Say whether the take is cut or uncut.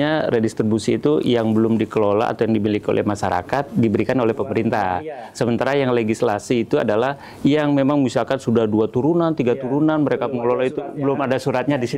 uncut